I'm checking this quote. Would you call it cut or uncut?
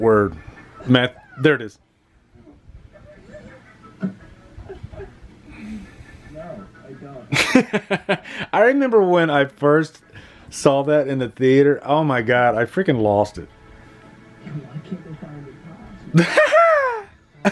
uncut